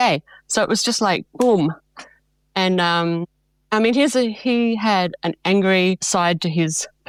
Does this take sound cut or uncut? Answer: uncut